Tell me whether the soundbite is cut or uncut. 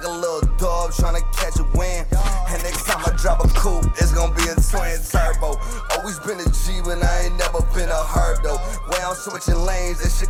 uncut